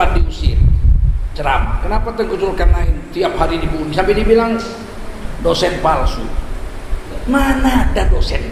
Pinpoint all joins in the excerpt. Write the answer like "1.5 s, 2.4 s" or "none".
none